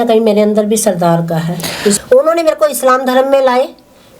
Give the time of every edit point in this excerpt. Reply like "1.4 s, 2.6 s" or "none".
2.0 s